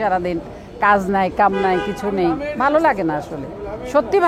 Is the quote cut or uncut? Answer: uncut